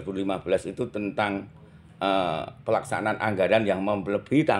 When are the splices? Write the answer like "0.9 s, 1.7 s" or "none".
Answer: none

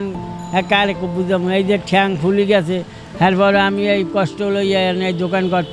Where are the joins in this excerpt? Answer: none

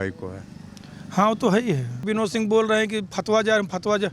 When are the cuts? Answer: 2.0 s

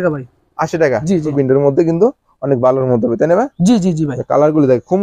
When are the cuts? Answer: 1.3 s

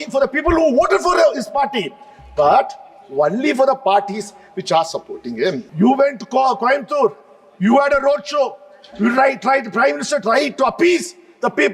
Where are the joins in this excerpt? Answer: 5.7 s

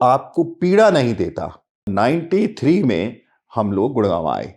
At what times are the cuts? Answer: 1.9 s

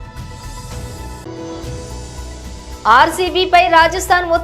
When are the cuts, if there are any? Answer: 1.9 s

